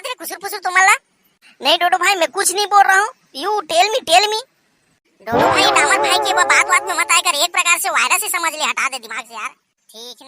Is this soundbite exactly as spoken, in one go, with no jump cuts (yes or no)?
yes